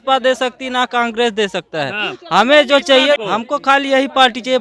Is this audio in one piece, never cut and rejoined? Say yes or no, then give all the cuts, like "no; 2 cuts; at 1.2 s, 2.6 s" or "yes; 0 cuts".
no; 1 cut; at 3.2 s